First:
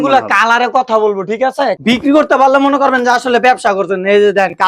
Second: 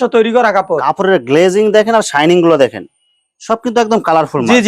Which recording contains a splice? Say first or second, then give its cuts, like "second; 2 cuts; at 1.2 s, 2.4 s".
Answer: first; 1 cut; at 1.8 s